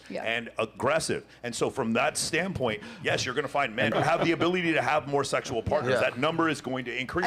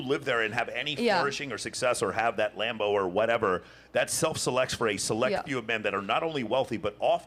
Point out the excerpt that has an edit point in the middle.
first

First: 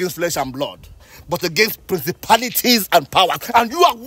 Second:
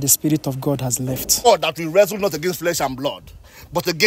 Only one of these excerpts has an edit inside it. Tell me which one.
second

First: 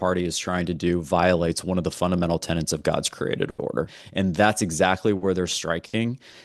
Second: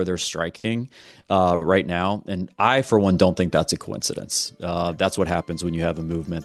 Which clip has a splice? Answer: first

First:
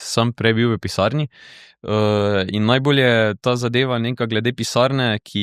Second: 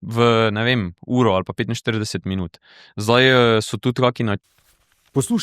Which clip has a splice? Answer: second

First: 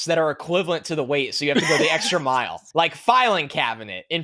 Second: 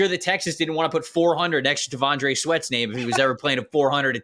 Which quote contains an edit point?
first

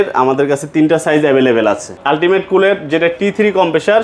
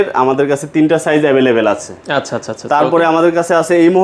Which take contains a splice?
first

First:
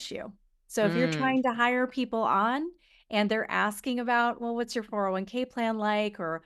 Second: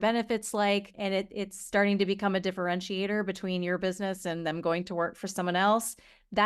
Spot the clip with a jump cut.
second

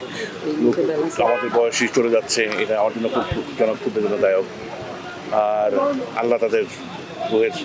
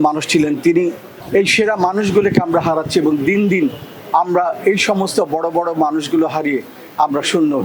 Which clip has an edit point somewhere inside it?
second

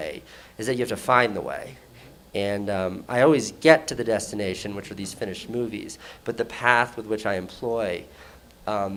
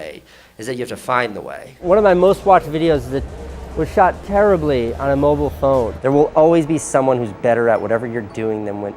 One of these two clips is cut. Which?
second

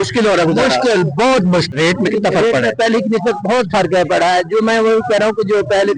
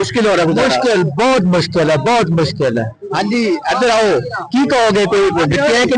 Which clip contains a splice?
first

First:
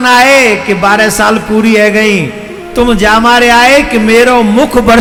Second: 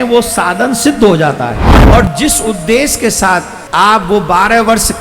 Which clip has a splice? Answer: second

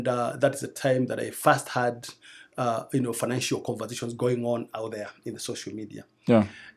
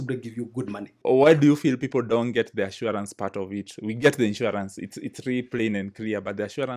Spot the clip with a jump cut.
second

